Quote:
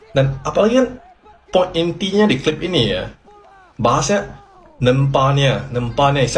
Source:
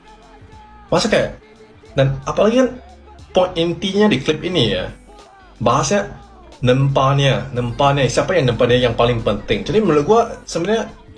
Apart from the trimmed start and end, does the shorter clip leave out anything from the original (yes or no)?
no